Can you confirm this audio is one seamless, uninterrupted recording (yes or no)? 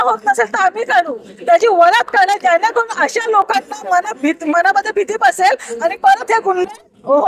yes